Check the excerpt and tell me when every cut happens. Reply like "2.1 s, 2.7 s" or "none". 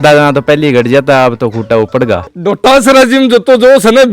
2.3 s